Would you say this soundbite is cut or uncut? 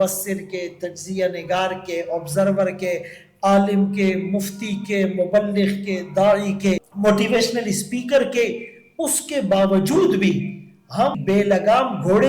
cut